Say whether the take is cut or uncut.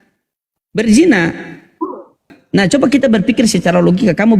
cut